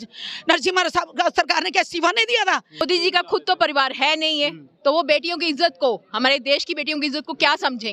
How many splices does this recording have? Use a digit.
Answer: 1